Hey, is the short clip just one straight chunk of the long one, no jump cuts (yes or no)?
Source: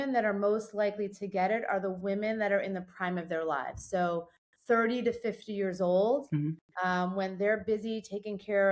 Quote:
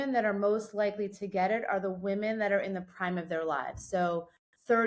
yes